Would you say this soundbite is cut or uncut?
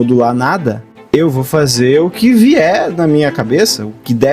cut